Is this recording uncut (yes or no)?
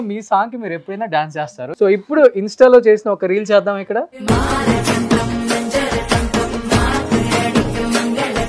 no